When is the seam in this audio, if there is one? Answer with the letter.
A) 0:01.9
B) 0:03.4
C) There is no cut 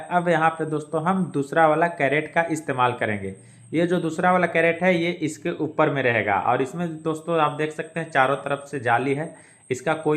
C